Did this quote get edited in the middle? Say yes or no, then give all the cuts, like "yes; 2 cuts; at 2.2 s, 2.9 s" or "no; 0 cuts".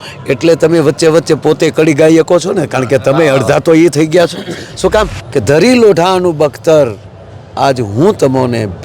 yes; 1 cut; at 5.2 s